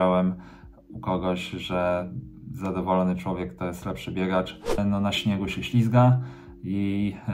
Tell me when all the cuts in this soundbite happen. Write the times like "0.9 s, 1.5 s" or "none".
4.8 s